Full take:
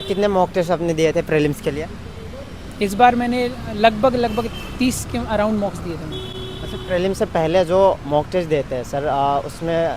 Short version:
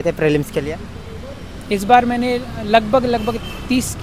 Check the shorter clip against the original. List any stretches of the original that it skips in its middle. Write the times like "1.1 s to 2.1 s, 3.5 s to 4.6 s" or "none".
none